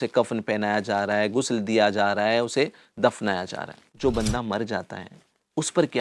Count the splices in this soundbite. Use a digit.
1